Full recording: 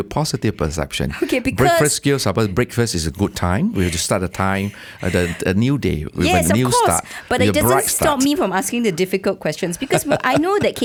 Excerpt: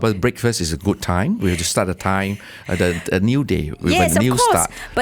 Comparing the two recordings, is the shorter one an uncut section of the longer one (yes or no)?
yes